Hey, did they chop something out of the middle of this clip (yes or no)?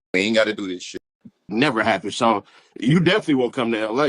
yes